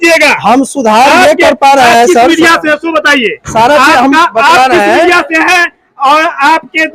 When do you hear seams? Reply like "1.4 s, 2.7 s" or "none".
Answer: none